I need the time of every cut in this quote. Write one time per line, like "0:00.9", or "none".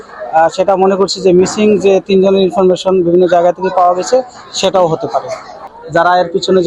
0:05.6